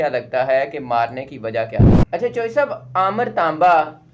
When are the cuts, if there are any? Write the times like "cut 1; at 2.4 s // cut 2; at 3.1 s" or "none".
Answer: cut 1; at 1.9 s